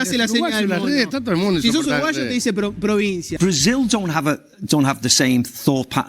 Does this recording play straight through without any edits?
no; 1 cut; at 3.3 s

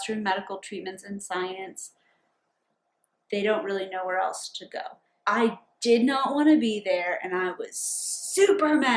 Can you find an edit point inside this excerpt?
yes; 1 cut; at 5.2 s

